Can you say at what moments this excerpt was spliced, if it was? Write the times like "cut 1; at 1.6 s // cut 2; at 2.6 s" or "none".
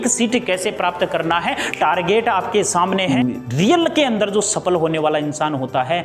cut 1; at 3.1 s